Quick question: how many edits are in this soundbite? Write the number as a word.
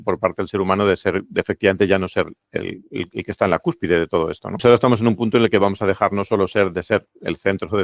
one